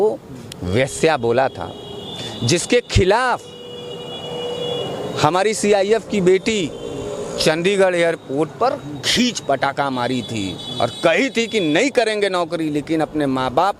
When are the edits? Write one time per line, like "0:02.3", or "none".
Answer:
none